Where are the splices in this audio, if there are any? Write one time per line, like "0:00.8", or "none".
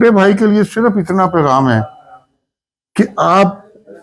none